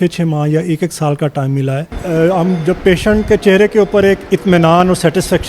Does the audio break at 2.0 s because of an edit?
yes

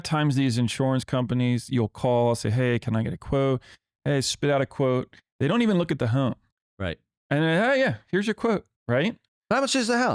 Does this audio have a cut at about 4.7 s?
no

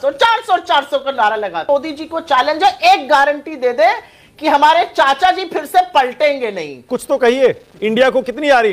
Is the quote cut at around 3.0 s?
no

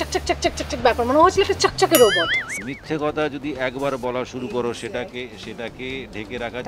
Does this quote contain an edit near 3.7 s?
no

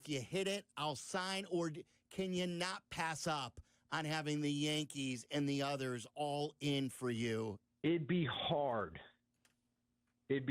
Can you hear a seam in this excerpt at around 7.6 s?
yes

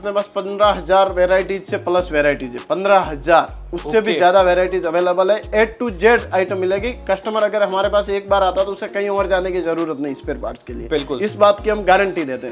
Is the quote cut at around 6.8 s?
no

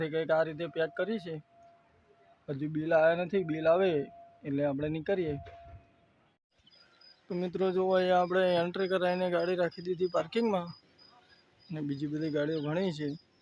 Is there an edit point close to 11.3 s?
no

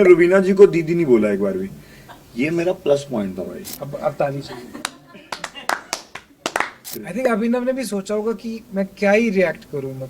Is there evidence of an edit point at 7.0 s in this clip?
yes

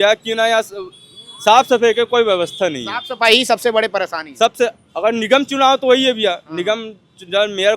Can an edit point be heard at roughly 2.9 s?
no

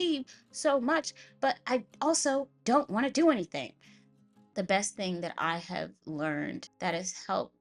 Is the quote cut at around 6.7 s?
yes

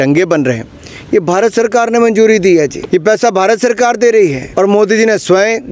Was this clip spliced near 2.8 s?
yes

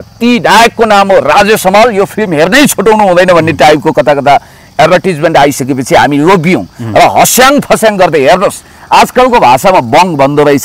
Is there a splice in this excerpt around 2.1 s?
no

